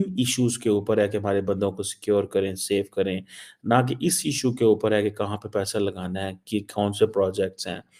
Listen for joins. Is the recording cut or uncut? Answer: uncut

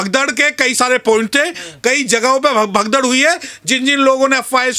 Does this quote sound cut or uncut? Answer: uncut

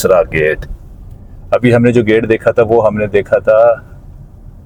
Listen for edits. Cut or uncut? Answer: uncut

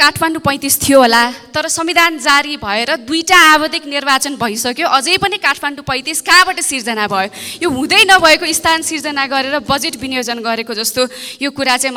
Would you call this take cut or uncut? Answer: uncut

